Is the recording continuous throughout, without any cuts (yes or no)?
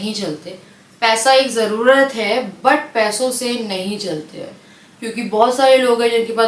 yes